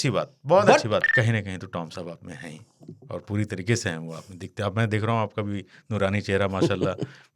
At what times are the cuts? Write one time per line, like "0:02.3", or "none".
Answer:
0:01.1